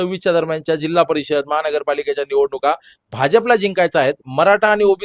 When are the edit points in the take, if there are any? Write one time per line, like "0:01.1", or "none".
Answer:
0:03.4